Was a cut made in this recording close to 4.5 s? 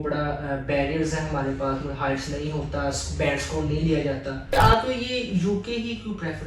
yes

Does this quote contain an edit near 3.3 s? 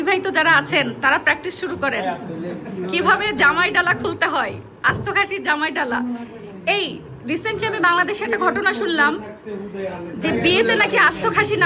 no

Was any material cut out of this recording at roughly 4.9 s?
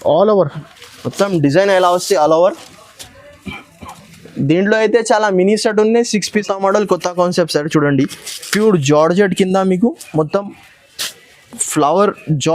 no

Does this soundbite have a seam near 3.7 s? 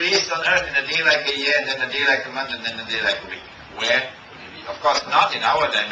no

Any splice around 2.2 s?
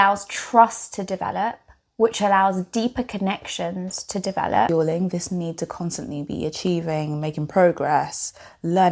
no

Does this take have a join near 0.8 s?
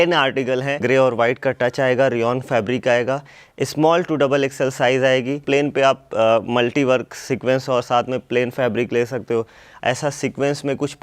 yes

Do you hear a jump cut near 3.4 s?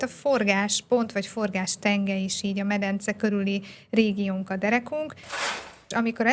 no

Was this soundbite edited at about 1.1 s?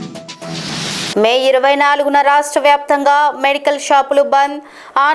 yes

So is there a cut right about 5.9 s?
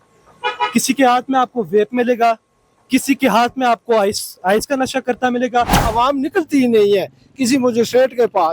yes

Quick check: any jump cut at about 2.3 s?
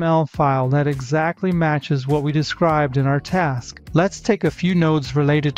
no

